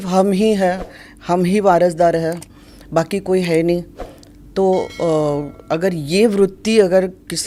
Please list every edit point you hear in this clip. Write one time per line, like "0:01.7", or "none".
none